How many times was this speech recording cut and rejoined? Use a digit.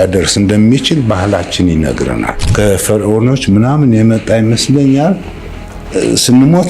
1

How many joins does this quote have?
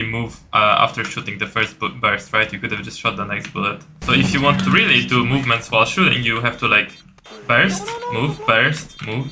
1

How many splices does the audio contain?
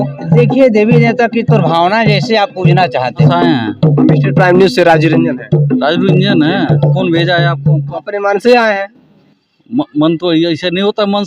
3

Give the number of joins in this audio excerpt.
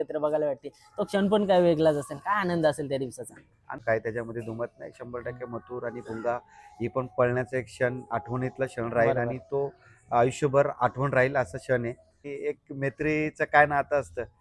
2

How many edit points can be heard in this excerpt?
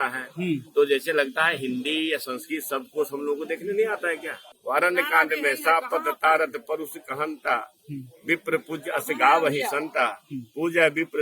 1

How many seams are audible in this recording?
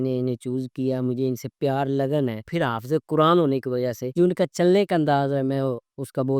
2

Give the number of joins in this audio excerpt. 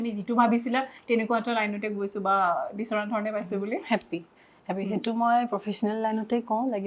0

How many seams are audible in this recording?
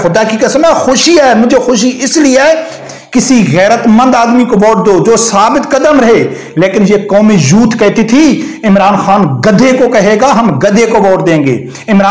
1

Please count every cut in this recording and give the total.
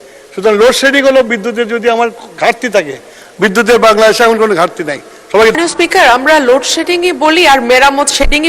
1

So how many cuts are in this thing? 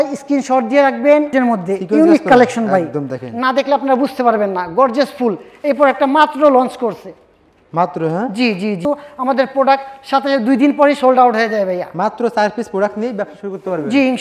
2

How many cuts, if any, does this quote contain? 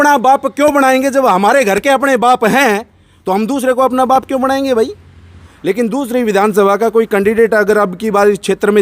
1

